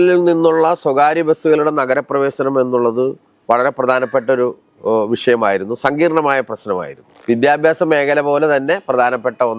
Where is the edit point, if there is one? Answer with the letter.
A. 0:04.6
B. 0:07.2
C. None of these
B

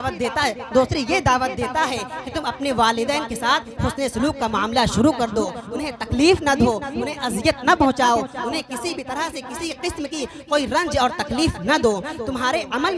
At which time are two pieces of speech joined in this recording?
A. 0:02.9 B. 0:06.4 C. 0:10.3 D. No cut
D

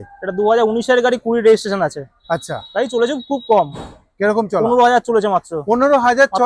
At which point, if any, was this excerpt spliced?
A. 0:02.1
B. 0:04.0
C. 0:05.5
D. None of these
D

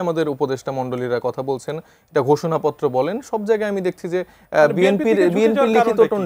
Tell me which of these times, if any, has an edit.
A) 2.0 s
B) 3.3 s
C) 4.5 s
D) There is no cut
D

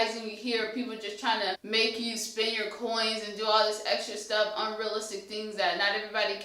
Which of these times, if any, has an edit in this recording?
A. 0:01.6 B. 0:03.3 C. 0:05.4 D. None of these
A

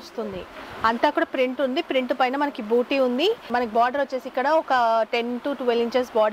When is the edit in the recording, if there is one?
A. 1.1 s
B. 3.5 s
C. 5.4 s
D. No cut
D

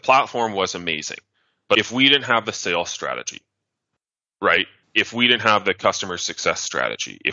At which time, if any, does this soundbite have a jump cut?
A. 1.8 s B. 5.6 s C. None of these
A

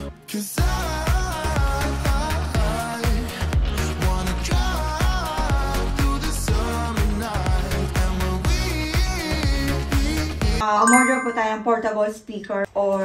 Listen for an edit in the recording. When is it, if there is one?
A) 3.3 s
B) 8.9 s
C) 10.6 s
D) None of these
C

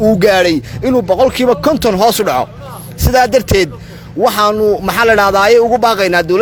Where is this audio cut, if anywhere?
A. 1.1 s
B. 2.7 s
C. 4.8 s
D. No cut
D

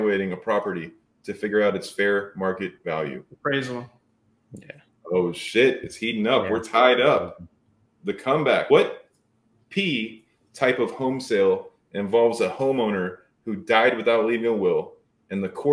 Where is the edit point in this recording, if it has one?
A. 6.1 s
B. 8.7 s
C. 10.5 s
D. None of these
B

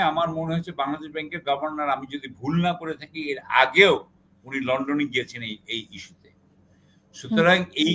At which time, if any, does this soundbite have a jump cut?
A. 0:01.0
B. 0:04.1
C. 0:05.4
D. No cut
D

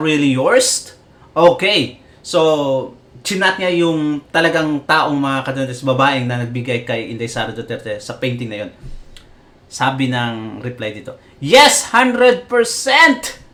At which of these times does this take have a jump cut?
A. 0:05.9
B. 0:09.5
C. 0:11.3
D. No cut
D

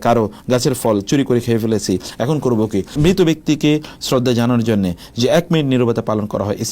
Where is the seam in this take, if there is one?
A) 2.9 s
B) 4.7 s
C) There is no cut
A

